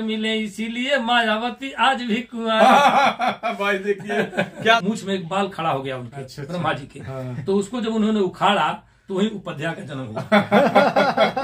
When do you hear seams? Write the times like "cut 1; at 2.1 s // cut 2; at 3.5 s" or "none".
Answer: cut 1; at 4.8 s